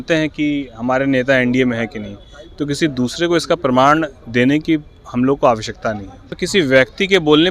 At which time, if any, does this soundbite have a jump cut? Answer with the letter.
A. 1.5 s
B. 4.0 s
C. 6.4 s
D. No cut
C